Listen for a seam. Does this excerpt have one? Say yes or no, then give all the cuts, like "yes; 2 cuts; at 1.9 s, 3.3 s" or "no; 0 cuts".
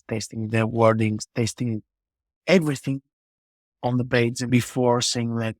yes; 1 cut; at 4.5 s